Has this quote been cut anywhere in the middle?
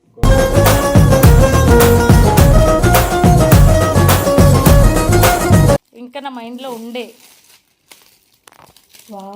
yes; 1 cut; at 5.9 s

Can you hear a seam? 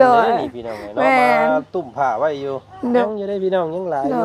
yes; 1 cut; at 3.0 s

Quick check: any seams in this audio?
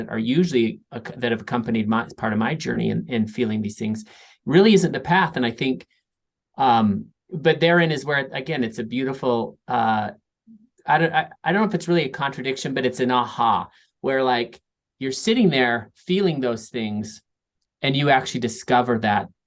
no; 0 cuts

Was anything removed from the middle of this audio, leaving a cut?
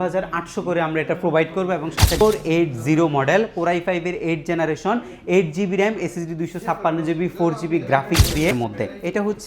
yes; 2 cuts; at 2.2 s, 8.5 s

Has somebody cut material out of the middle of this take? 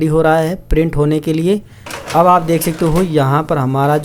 no; 0 cuts

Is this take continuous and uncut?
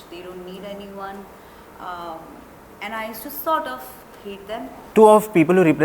no; 1 cut; at 4.8 s

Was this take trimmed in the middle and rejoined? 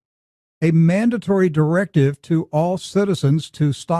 yes; 1 cut; at 1.6 s

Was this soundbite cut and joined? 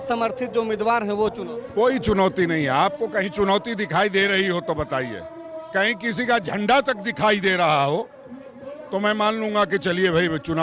no; 0 cuts

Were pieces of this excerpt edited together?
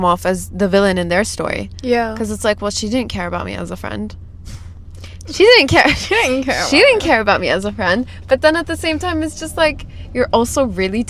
no; 0 cuts

